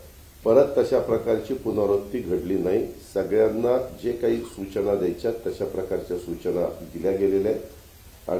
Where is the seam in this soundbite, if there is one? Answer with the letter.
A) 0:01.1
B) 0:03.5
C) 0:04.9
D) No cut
D